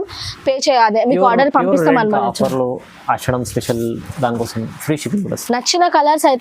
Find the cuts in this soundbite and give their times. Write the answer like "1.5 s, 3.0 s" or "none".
2.2 s